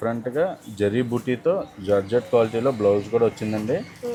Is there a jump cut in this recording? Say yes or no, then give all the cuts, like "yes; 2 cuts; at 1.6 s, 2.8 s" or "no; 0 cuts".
no; 0 cuts